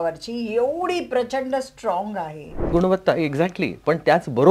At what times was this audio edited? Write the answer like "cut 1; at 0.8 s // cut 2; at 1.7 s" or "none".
cut 1; at 2.7 s

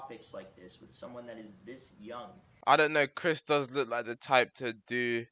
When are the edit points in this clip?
cut 1; at 2.5 s

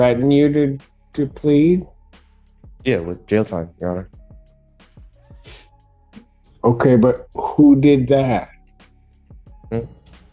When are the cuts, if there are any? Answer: none

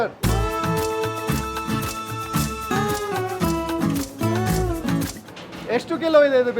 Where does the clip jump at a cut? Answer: cut 1; at 5.3 s

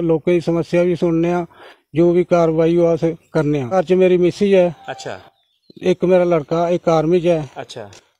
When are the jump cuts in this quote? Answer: cut 1; at 3.7 s

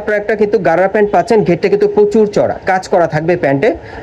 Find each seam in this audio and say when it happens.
none

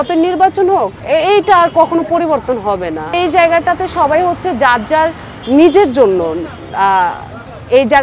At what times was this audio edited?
cut 1; at 1.0 s // cut 2; at 3.1 s

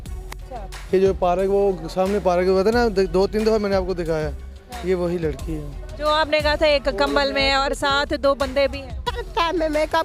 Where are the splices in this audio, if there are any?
cut 1; at 9.2 s

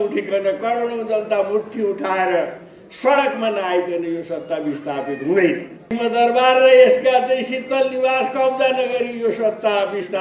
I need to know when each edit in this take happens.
cut 1; at 5.9 s

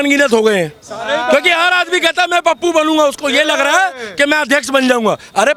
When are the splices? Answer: none

